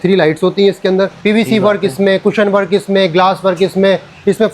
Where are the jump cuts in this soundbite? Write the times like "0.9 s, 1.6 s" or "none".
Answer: 1.2 s